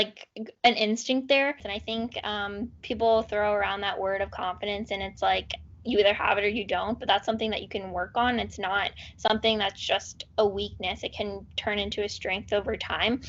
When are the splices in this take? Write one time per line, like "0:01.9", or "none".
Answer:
0:01.7